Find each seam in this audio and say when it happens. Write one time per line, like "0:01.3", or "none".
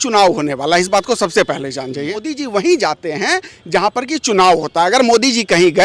0:02.3